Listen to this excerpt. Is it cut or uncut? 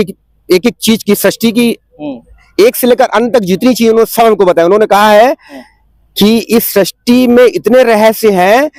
uncut